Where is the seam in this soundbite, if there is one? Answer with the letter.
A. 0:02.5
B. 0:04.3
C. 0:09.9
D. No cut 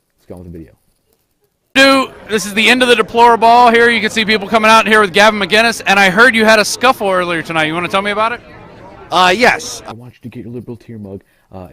D